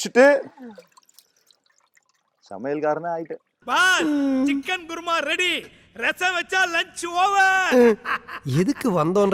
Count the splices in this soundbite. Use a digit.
0